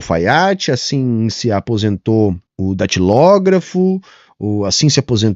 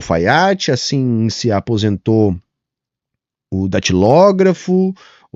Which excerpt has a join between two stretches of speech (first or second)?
first